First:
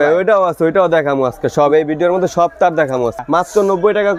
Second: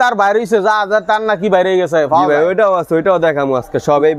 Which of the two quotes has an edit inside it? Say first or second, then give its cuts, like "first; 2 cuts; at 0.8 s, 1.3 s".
first; 1 cut; at 3.2 s